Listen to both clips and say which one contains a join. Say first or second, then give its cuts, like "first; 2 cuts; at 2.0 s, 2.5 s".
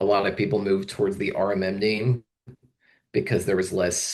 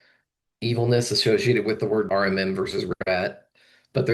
second; 1 cut; at 2.1 s